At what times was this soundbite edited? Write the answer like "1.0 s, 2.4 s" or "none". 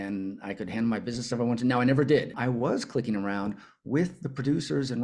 2.4 s

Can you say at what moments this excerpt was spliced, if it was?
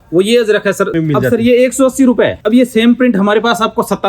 0.9 s, 2.4 s

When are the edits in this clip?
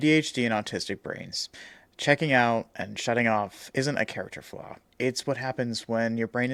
none

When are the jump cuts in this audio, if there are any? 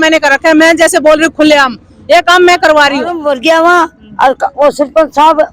3.2 s

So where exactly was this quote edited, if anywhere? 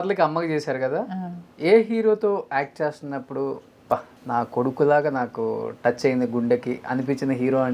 4.1 s

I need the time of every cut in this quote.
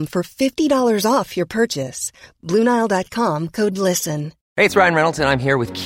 none

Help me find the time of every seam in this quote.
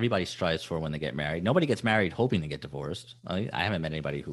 none

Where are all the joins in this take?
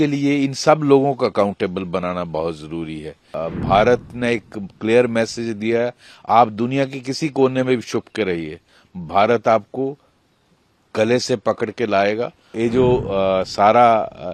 3.4 s, 12.5 s

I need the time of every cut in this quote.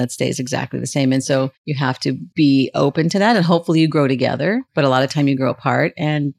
1.6 s, 4.7 s

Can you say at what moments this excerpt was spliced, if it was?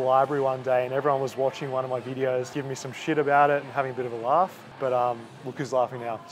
2.5 s, 4.6 s

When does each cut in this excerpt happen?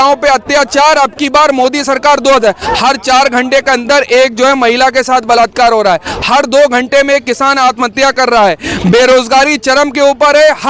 none

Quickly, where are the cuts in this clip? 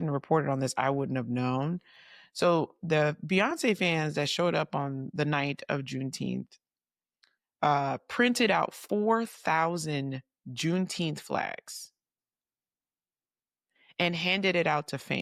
none

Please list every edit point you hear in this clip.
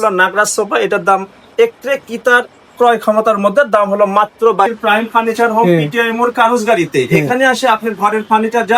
4.7 s

